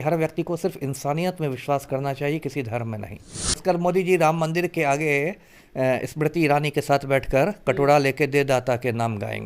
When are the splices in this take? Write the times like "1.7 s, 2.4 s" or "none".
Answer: 3.6 s